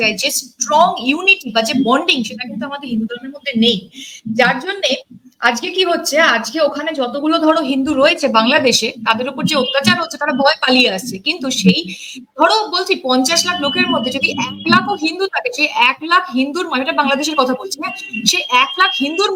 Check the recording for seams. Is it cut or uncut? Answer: uncut